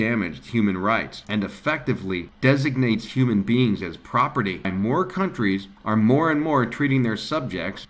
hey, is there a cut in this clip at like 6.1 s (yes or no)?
no